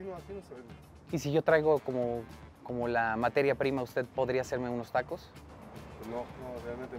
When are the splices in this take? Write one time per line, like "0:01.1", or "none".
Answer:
none